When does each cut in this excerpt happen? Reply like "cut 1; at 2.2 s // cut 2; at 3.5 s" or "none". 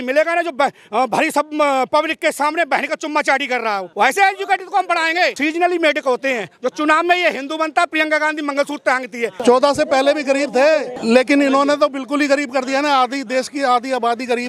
cut 1; at 3.9 s // cut 2; at 5.4 s // cut 3; at 9.4 s // cut 4; at 10.9 s